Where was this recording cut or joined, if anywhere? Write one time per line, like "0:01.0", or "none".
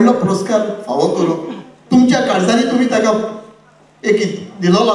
none